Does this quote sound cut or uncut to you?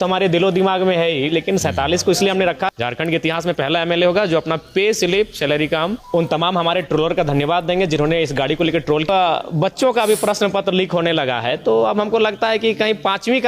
cut